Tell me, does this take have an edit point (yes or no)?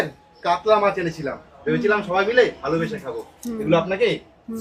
no